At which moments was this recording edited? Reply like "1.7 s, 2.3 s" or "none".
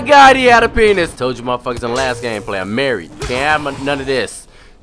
1.2 s